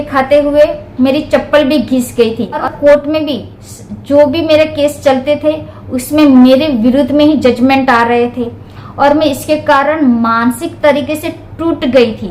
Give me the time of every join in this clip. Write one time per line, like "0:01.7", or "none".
0:02.6